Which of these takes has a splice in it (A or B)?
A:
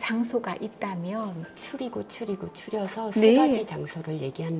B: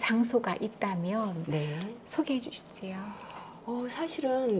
A